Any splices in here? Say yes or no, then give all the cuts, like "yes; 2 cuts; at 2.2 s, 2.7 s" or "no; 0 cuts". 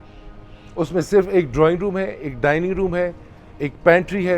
no; 0 cuts